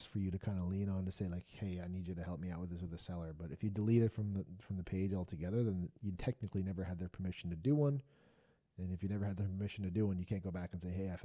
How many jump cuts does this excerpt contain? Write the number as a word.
zero